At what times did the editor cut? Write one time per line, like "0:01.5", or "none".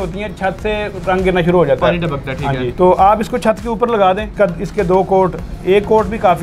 0:02.7
0:04.3